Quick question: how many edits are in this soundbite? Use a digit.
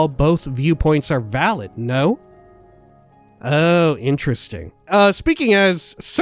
1